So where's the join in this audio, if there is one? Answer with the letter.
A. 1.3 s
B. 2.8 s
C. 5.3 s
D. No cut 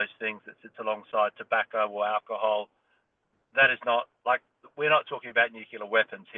D